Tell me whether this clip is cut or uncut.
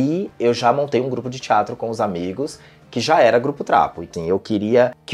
cut